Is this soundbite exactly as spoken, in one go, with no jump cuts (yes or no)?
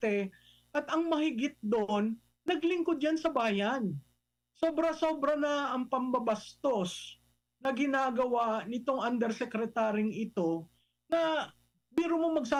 yes